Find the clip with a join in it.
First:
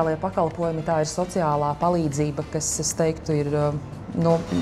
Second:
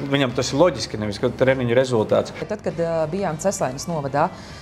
second; 1 cut; at 2.5 s

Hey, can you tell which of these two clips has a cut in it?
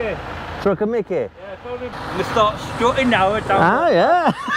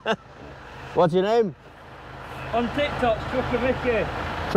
first; 1 cut; at 1.9 s

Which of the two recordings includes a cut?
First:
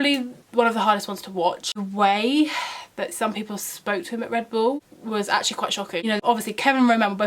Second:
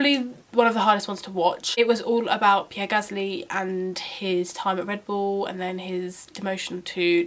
first; 2 cuts; at 1.7 s, 6.2 s

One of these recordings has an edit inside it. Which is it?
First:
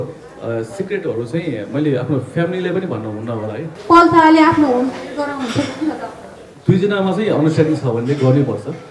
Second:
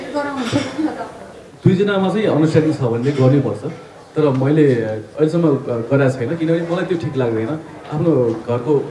first; 1 cut; at 3.7 s

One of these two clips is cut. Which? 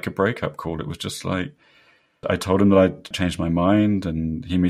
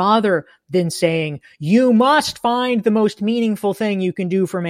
first; 2 cuts; at 2.2 s, 3.1 s

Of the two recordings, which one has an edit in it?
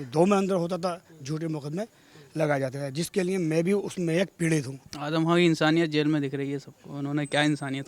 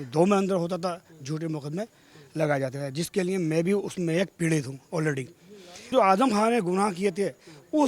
first; 1 cut; at 4.8 s

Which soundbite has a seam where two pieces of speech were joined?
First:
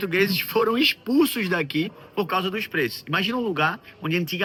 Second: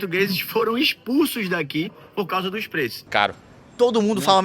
second; 1 cut; at 3.0 s

